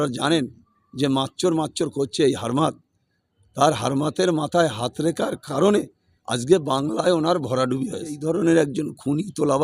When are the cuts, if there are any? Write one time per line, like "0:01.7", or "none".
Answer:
0:08.2